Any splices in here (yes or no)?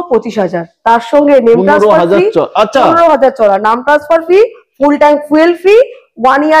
no